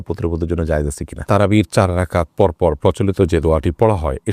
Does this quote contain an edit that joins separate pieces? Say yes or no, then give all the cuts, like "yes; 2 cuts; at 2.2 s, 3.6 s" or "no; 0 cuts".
yes; 1 cut; at 1.2 s